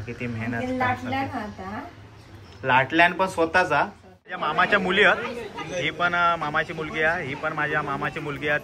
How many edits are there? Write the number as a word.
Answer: one